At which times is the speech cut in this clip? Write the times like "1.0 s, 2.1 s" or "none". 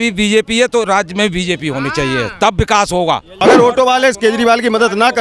3.4 s

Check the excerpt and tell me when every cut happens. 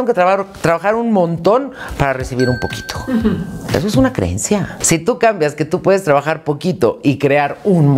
4.8 s

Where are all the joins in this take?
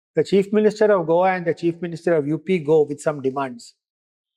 none

